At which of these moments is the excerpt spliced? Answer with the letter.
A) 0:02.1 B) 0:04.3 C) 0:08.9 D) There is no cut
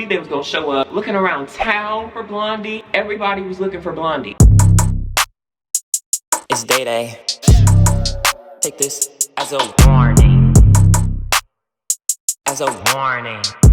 B